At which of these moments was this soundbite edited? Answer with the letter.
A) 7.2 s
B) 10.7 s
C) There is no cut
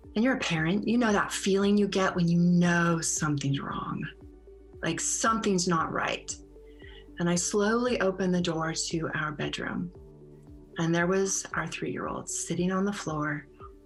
C